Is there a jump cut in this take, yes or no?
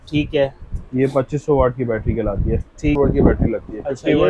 yes